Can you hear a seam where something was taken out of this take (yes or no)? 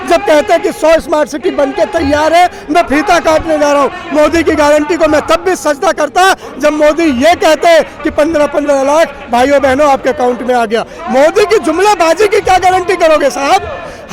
no